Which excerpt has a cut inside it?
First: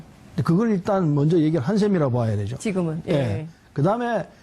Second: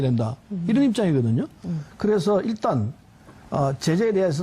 first; 1 cut; at 1.5 s

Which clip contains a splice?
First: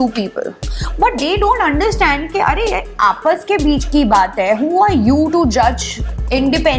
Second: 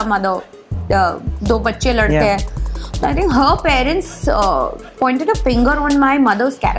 second; 1 cut; at 4.8 s

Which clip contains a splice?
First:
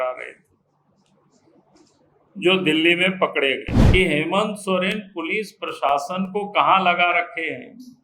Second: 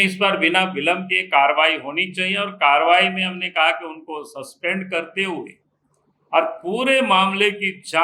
first; 1 cut; at 3.7 s

